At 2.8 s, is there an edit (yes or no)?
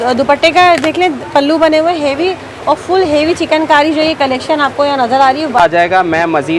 no